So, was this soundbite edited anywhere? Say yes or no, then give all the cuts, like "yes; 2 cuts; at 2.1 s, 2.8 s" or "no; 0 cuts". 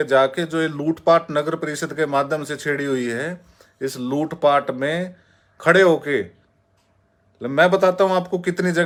no; 0 cuts